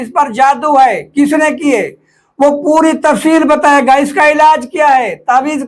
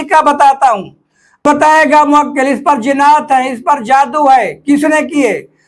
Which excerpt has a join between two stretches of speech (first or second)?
second